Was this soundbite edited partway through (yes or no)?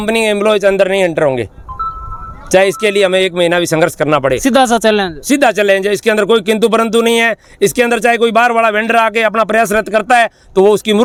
no